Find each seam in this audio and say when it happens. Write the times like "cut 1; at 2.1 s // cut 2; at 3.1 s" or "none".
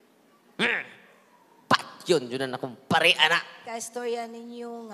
cut 1; at 3.6 s